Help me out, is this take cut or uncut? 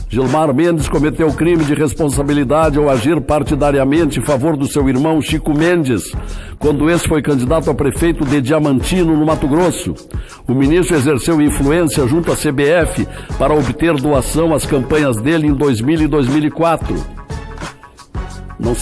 uncut